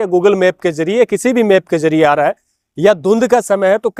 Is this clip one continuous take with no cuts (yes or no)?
yes